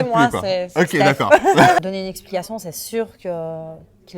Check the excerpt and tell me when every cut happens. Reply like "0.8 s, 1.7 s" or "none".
1.8 s